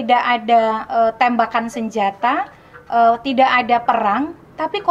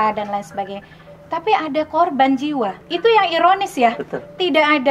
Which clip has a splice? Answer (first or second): second